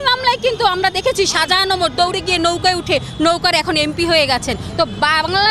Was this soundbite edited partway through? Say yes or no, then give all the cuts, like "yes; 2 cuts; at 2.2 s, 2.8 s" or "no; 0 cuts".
no; 0 cuts